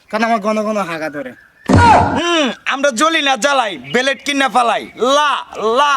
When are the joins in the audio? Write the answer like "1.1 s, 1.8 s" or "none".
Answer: 1.4 s, 2.2 s